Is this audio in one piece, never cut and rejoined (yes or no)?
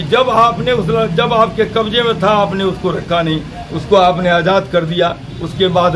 yes